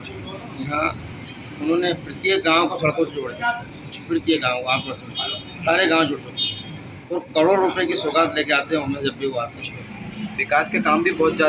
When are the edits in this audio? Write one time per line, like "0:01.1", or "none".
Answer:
0:09.9

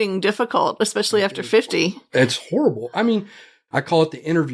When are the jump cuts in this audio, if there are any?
0:03.6

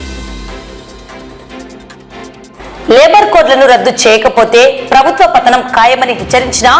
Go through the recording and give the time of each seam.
0:02.2

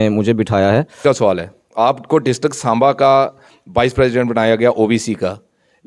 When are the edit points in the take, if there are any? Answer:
0:01.0

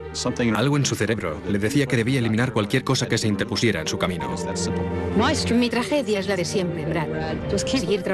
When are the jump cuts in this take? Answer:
0:01.9

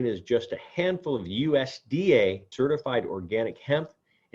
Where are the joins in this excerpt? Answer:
0:02.5

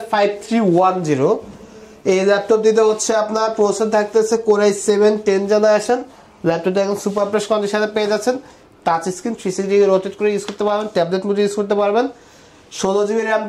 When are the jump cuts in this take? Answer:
none

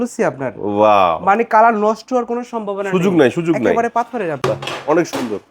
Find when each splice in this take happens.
0:04.4

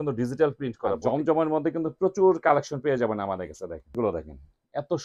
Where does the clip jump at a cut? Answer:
0:01.0
0:03.9

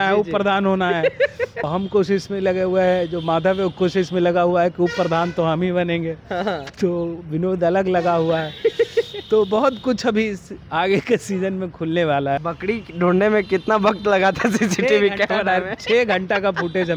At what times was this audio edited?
0:01.7
0:12.4

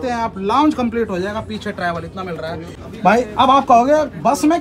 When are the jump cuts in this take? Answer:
0:02.8

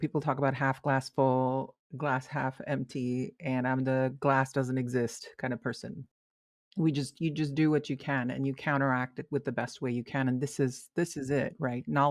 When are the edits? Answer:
0:06.1

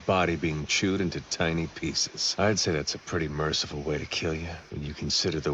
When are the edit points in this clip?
0:02.0
0:04.6

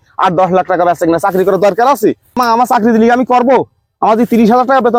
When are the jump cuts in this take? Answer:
0:02.4

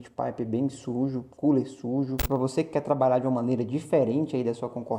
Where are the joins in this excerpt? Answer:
0:02.2

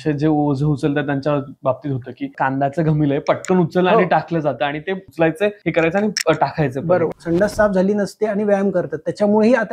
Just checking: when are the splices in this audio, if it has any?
0:02.3
0:05.4
0:07.2

